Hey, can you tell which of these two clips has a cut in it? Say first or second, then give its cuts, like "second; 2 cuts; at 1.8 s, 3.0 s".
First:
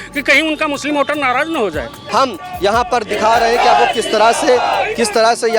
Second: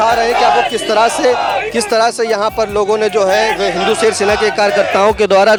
first; 1 cut; at 2.0 s